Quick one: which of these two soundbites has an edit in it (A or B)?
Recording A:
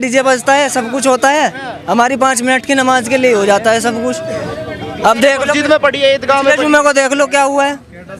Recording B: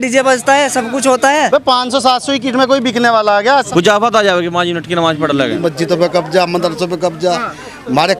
B